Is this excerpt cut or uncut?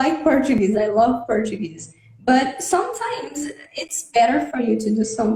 uncut